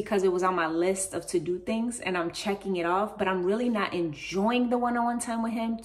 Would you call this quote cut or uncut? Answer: uncut